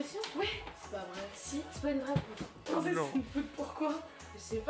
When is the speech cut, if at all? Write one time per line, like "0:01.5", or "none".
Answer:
0:02.5